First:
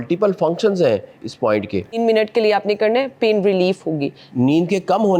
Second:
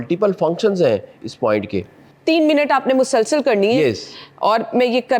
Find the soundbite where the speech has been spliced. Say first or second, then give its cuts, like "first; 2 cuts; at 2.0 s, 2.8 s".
first; 2 cuts; at 2.0 s, 4.2 s